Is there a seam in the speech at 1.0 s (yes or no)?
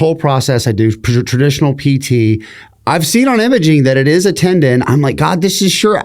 no